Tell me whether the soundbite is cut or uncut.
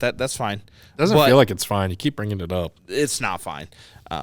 uncut